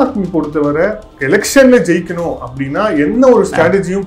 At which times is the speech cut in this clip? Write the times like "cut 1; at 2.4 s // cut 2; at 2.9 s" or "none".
cut 1; at 1.1 s